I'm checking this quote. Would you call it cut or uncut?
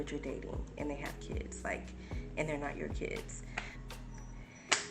cut